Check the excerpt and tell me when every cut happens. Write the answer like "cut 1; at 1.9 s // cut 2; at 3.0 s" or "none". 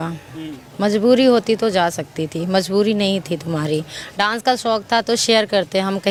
none

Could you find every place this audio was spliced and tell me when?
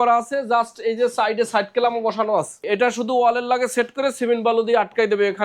cut 1; at 2.6 s

